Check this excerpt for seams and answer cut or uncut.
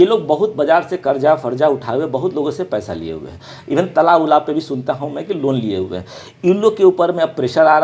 uncut